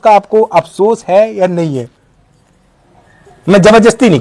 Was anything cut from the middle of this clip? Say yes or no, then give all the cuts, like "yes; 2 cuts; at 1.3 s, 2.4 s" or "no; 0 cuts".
no; 0 cuts